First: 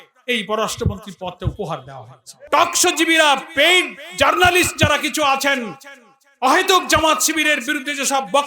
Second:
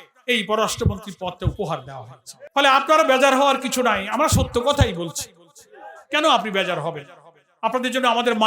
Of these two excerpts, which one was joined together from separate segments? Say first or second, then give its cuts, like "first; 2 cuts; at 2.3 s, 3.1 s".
first; 1 cut; at 2.4 s